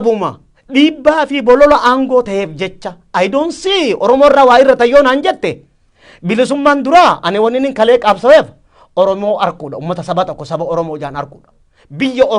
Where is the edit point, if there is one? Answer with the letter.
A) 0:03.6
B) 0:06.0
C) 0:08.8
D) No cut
D